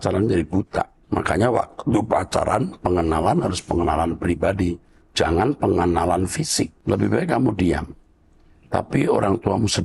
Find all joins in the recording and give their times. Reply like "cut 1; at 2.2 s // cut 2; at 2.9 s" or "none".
cut 1; at 1.0 s // cut 2; at 6.8 s